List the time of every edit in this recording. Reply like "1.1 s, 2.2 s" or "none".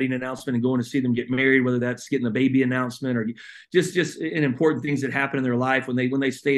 none